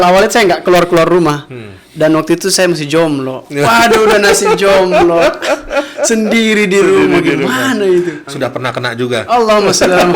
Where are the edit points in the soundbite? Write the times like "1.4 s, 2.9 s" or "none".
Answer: 8.2 s

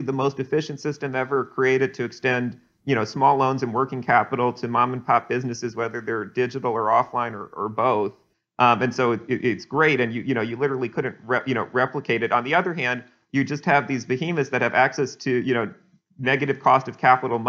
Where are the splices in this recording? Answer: none

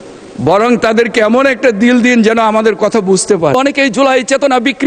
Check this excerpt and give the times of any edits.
3.5 s

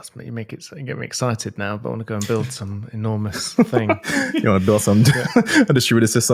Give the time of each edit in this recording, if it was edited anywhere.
none

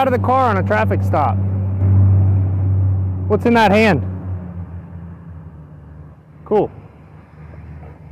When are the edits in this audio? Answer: none

